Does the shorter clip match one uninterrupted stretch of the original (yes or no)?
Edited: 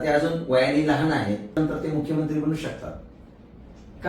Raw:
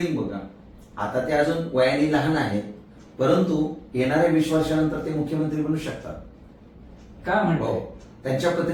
no